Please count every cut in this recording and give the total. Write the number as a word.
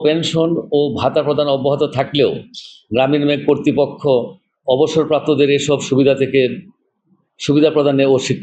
zero